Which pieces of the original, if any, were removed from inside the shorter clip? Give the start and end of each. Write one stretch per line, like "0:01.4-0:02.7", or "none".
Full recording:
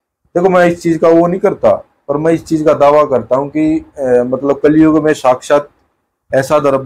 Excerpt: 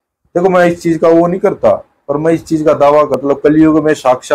0:03.1-0:04.3

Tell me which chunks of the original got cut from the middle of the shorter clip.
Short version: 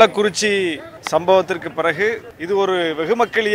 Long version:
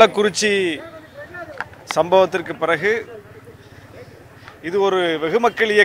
0:00.9-0:01.7
0:03.1-0:04.5

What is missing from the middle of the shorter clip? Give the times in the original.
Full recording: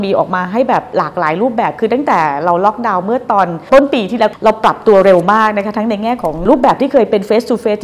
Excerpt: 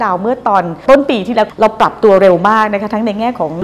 none

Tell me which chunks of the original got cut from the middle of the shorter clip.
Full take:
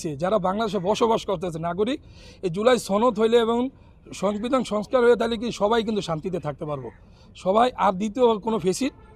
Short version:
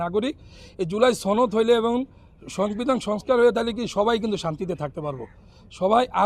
none

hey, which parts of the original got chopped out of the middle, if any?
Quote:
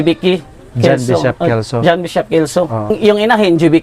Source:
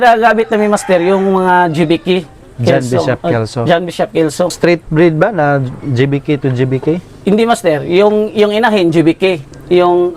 0:04.6-0:08.1

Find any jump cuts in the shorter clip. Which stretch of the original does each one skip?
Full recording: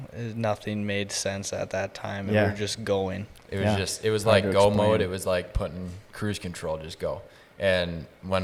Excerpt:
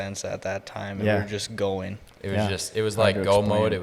none

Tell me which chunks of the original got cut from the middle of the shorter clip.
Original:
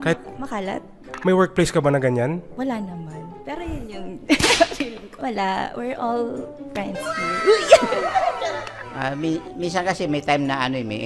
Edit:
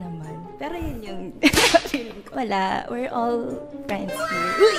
none

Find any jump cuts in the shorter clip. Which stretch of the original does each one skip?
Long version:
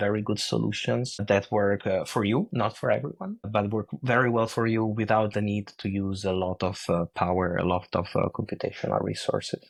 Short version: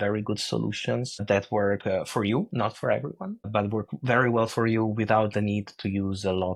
none

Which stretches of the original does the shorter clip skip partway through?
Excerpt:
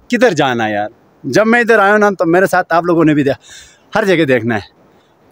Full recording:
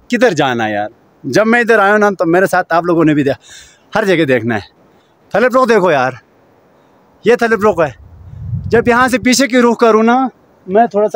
none

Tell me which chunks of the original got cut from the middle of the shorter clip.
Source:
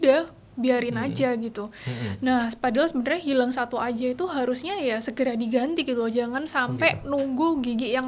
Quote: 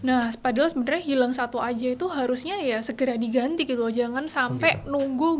none

